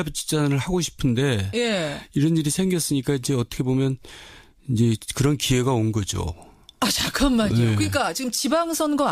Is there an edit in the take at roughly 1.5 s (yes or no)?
no